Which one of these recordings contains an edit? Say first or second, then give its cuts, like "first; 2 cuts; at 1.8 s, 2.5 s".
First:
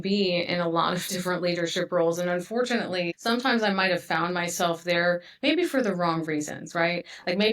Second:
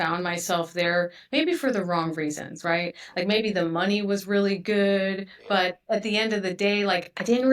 first; 1 cut; at 3.1 s